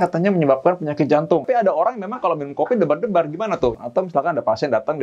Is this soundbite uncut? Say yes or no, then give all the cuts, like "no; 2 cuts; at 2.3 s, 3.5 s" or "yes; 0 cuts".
no; 2 cuts; at 1.4 s, 3.7 s